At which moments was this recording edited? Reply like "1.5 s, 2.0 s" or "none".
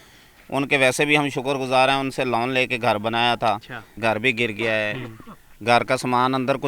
4.0 s